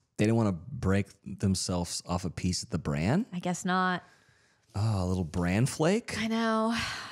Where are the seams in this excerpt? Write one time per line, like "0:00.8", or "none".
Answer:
none